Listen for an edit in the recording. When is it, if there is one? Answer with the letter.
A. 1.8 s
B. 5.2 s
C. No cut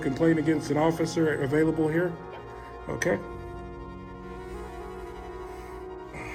C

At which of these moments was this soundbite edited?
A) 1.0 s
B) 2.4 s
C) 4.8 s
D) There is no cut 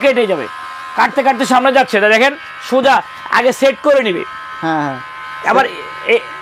D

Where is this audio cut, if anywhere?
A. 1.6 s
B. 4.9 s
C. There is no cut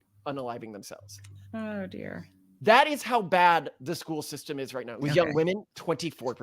B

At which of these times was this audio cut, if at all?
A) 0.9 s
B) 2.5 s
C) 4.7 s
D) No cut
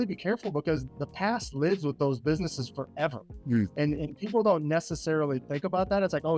A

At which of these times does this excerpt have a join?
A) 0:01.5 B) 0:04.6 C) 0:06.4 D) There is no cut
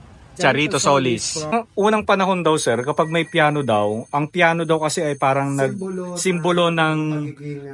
A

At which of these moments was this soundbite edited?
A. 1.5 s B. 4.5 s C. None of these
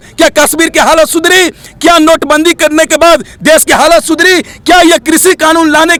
C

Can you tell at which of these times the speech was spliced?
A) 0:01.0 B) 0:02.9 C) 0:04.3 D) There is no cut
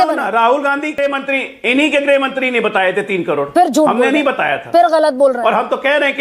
A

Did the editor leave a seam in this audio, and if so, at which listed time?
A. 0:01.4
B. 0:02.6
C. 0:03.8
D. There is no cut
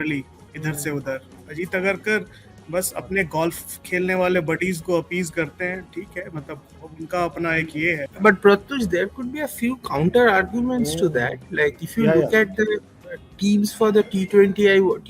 A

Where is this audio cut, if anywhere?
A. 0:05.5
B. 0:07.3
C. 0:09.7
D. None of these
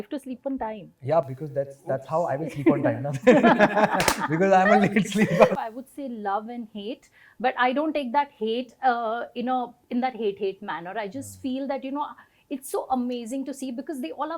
A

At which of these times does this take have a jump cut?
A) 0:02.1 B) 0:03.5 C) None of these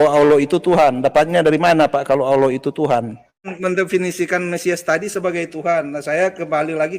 B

